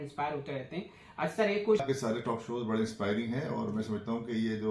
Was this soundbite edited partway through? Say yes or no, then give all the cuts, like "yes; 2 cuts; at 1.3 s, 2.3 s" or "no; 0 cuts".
yes; 1 cut; at 1.8 s